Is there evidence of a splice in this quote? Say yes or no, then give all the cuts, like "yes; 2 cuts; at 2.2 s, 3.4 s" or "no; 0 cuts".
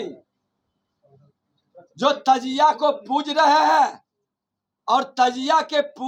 no; 0 cuts